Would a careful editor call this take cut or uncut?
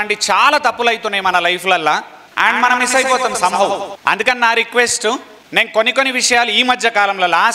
cut